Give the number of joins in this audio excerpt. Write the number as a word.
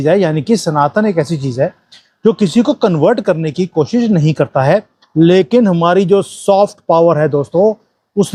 zero